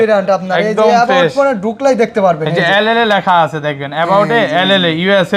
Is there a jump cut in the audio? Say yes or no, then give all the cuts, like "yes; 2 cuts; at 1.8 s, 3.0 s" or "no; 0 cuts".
no; 0 cuts